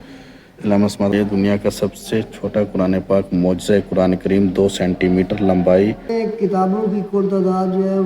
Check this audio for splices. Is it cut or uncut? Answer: cut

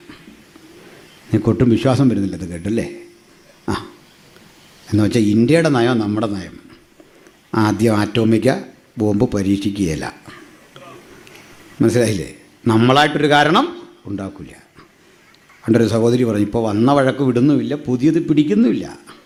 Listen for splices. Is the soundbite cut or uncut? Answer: uncut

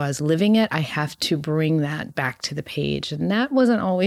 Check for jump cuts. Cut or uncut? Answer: uncut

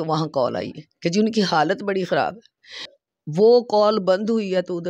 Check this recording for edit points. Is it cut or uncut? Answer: cut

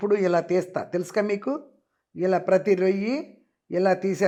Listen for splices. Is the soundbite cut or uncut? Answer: uncut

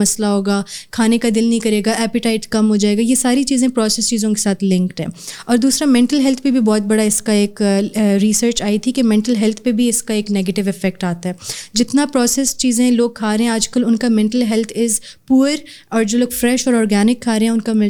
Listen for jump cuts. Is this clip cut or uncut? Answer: uncut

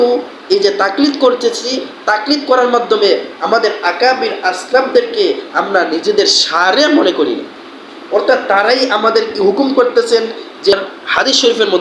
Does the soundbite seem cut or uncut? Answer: cut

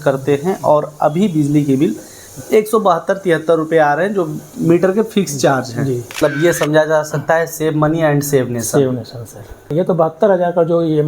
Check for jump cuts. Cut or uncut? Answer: cut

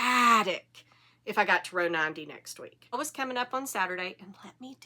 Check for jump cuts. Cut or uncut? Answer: cut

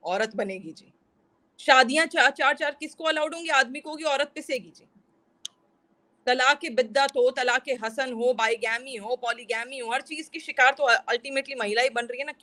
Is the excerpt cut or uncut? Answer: uncut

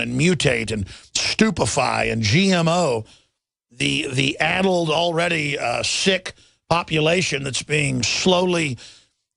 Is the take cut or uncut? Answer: cut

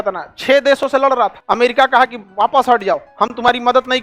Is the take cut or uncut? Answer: cut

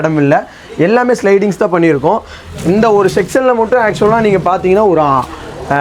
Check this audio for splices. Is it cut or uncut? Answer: uncut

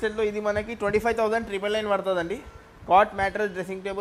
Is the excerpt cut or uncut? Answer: uncut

